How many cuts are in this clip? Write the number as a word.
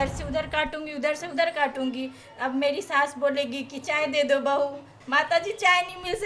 one